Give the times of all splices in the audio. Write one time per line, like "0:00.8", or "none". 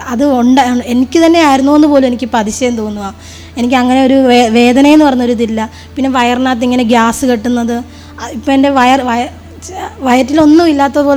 none